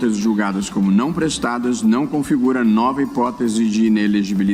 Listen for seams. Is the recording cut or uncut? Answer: uncut